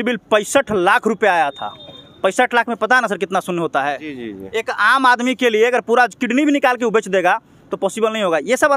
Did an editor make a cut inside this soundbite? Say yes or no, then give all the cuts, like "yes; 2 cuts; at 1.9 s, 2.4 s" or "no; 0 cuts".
no; 0 cuts